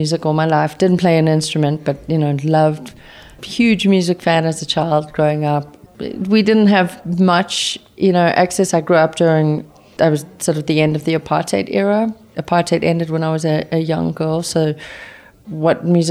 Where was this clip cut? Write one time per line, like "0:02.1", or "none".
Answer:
0:03.4
0:05.8
0:09.6